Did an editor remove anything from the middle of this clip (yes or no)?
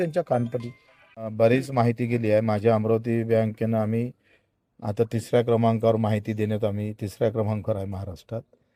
no